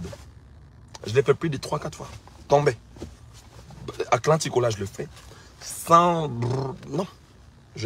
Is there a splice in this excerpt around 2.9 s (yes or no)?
yes